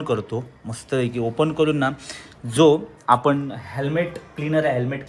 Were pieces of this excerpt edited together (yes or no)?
no